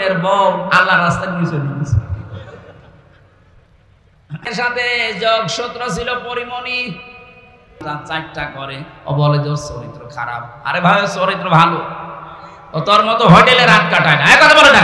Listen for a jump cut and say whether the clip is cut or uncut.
cut